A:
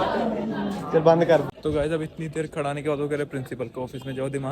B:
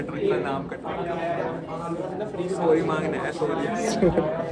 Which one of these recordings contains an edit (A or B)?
A